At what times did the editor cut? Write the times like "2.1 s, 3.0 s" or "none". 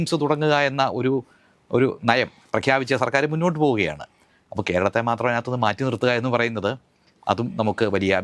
none